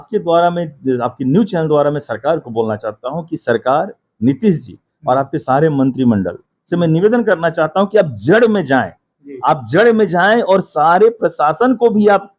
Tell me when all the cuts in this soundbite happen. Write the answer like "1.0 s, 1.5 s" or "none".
none